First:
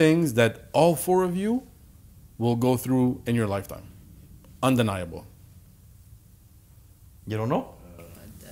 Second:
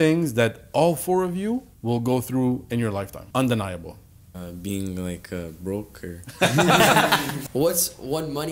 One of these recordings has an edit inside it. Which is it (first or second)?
second